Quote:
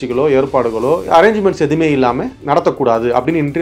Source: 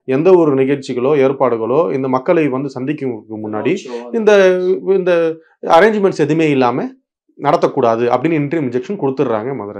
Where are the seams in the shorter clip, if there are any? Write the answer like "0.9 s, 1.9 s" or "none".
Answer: 1.0 s, 2.3 s